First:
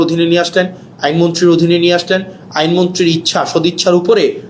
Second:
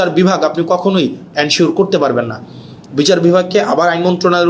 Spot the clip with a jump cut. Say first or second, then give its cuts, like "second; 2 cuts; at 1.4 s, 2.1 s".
second; 1 cut; at 2.8 s